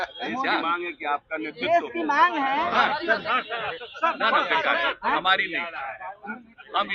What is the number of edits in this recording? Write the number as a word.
zero